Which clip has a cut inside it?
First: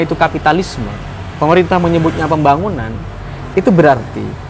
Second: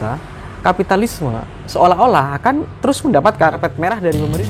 second; 1 cut; at 3.6 s

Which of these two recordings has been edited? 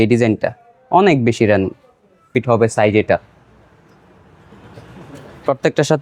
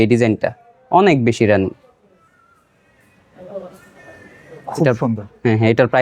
first; 1 cut; at 2.3 s

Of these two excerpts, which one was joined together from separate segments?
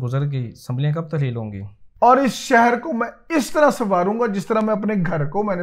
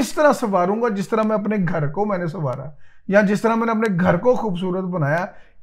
first; 1 cut; at 1.8 s

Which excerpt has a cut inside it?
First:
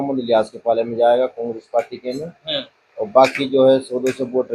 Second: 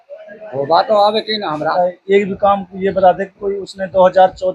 second; 1 cut; at 1.7 s

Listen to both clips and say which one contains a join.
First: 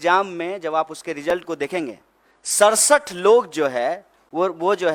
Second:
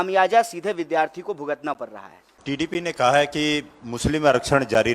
second; 1 cut; at 2.3 s

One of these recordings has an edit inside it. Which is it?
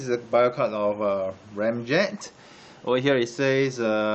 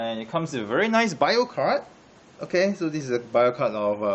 first; 1 cut; at 2.3 s

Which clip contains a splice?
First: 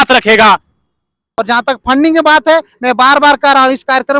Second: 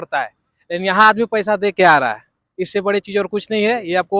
first; 1 cut; at 1.2 s

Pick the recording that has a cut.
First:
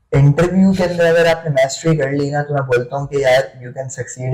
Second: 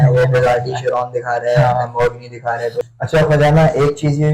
second; 1 cut; at 2.8 s

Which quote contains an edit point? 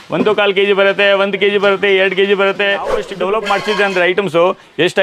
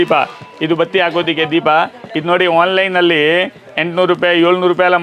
first; 1 cut; at 3.1 s

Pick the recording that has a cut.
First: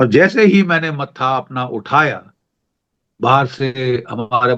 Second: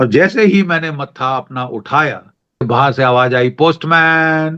second; 1 cut; at 2.7 s

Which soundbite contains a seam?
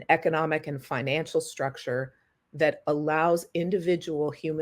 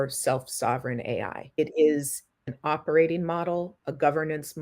second; 2 cuts; at 1.4 s, 2.4 s

